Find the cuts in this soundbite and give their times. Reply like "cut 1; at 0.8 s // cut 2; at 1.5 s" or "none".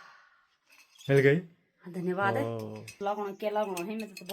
cut 1; at 3.0 s